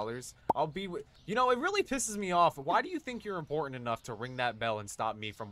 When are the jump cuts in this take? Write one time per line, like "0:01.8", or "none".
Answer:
none